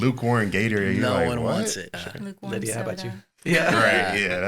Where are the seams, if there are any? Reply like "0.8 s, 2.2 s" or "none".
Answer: 2.0 s